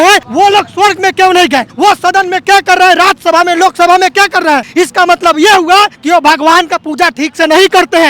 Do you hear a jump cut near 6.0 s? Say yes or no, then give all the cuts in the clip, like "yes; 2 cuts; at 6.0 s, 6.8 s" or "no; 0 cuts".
yes; 2 cuts; at 4.7 s, 6.0 s